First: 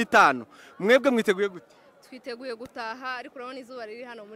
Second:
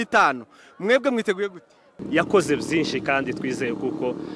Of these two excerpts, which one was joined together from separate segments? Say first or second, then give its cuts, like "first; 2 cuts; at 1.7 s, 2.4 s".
second; 1 cut; at 1.9 s